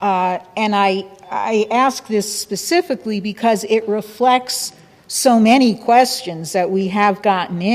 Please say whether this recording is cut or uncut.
cut